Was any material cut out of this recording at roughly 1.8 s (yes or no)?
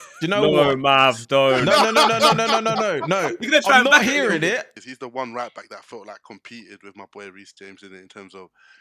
no